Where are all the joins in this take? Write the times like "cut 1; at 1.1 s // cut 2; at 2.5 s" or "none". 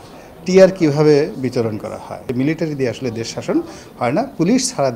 cut 1; at 2.3 s

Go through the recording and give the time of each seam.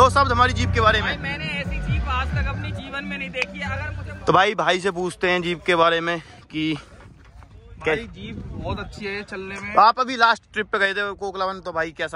cut 1; at 4.1 s

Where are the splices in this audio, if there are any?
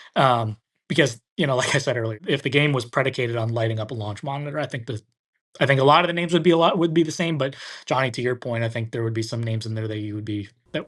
cut 1; at 2.2 s

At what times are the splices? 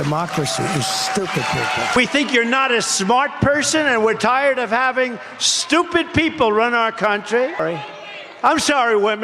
cut 1; at 2.0 s // cut 2; at 7.6 s

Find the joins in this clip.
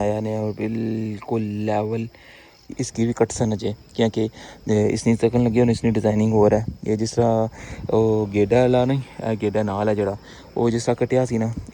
cut 1; at 2.8 s

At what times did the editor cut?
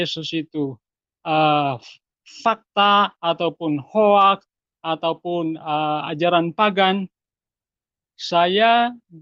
none

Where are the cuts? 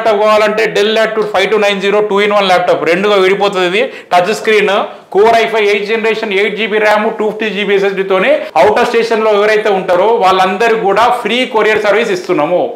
cut 1; at 8.5 s

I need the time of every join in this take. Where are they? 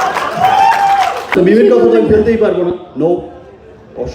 cut 1; at 1.3 s

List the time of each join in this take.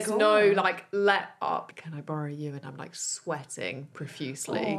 cut 1; at 1.7 s

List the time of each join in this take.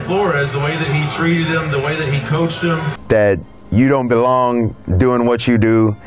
cut 1; at 2.9 s

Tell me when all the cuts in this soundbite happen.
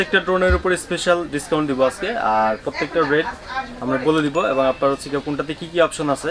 none

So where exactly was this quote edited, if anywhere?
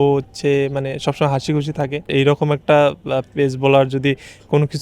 cut 1; at 2.1 s

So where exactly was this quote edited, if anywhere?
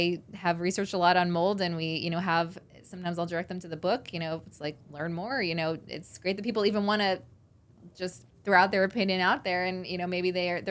none

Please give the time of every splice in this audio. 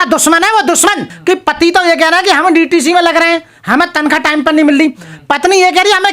cut 1; at 1.1 s

